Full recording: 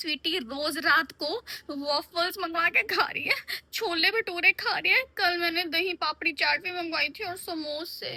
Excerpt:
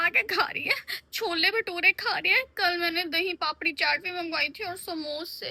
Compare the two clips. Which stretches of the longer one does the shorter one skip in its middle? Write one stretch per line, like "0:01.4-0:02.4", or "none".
none

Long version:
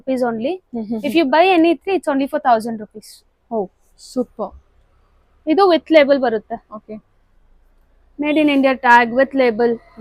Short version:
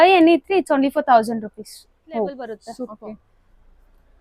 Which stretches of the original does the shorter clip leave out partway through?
0:04.1-0:06.6

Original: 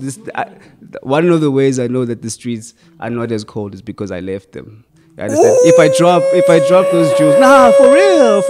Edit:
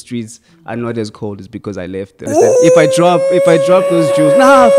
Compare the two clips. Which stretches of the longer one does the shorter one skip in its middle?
0:04.6-0:05.3

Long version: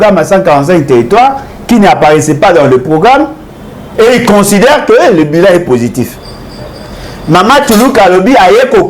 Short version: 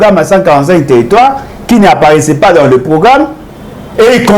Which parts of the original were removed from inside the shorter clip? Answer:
none

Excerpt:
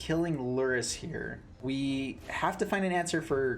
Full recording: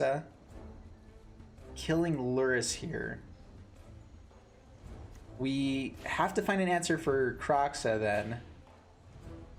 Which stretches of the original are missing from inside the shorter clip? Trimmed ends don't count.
0:03.2-0:05.2

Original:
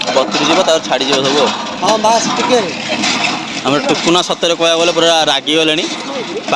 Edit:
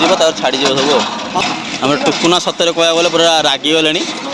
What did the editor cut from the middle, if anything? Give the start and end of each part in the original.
0:01.9-0:03.2

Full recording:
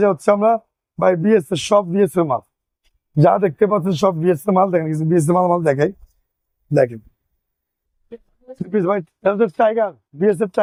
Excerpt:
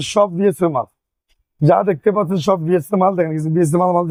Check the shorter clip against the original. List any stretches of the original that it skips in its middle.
none

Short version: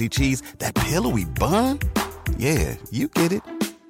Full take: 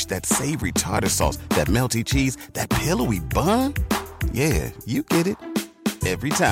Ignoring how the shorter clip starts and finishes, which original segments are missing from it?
none

